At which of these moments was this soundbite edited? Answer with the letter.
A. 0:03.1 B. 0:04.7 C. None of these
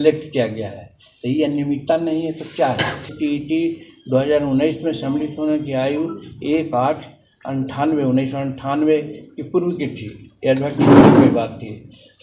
A